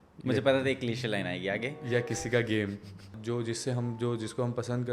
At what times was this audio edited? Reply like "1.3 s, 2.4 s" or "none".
3.1 s